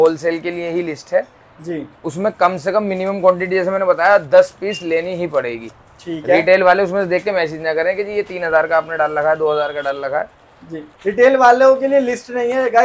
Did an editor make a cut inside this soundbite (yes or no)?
no